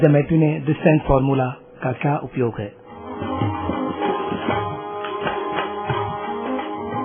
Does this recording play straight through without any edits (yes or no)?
no